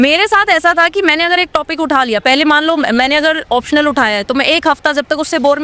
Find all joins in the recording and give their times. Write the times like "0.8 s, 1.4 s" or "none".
none